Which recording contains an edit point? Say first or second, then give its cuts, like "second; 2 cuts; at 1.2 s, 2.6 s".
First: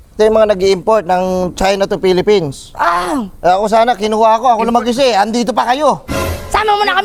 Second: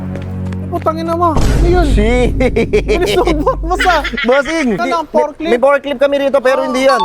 second; 1 cut; at 4.8 s